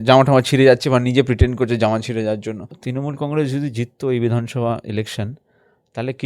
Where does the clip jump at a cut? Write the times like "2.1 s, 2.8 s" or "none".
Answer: 2.8 s